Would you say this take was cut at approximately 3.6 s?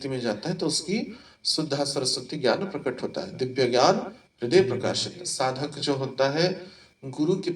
no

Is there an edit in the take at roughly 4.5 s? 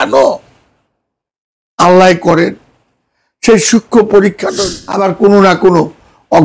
yes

